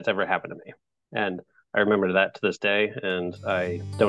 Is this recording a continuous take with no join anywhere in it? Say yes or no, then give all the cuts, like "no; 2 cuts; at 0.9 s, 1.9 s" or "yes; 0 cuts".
yes; 0 cuts